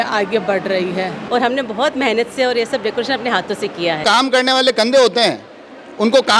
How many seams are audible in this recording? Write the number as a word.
two